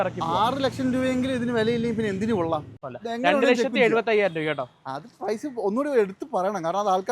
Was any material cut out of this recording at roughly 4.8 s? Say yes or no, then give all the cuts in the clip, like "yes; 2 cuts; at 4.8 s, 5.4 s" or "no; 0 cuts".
no; 1 cut; at 2.7 s